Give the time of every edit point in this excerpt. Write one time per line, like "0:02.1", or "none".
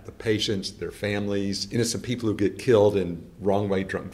0:01.6